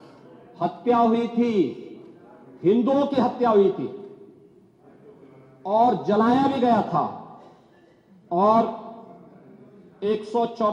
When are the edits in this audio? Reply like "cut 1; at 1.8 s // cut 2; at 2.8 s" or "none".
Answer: none